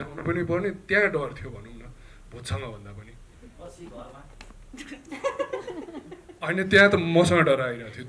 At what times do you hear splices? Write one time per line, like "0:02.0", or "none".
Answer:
none